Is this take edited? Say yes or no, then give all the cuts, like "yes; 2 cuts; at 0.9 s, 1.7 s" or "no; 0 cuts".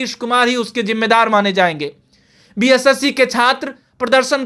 no; 0 cuts